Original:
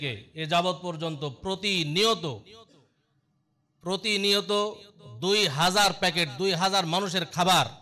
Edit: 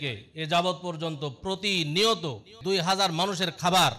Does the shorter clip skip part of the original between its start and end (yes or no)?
yes